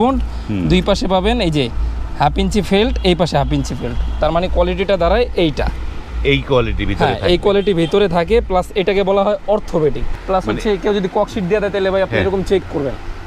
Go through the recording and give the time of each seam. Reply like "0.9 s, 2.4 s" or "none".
10.1 s